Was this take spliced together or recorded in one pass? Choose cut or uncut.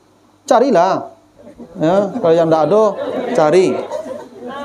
uncut